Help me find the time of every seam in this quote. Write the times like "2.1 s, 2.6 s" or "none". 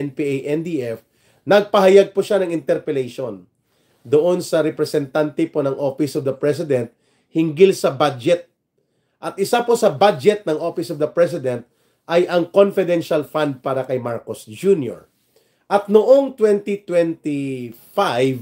none